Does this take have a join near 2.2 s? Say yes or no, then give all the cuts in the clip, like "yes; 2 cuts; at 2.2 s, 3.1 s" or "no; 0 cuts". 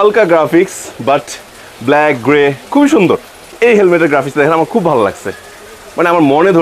no; 1 cut; at 3.5 s